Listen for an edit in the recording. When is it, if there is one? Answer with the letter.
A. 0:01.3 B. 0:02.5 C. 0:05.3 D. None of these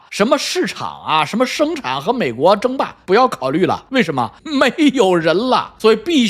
D